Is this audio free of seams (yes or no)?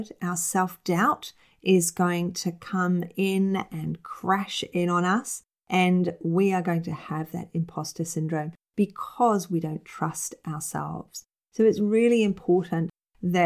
yes